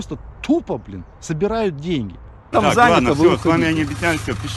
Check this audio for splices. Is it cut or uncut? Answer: cut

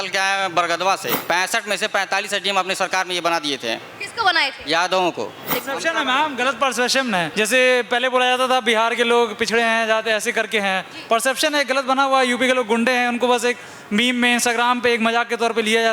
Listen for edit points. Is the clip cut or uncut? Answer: cut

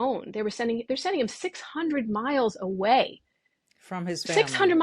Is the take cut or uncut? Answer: uncut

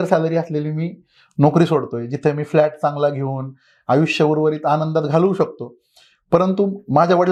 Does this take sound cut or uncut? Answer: uncut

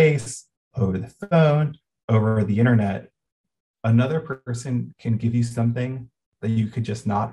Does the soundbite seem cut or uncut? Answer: uncut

